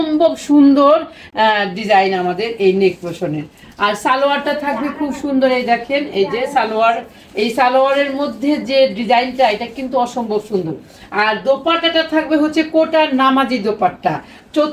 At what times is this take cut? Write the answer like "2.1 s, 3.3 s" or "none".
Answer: none